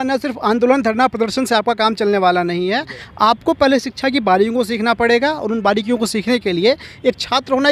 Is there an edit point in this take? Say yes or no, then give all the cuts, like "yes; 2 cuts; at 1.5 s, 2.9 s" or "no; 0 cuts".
no; 0 cuts